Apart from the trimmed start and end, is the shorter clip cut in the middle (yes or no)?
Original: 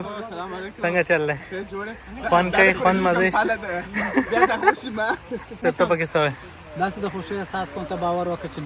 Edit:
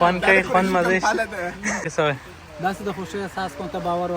yes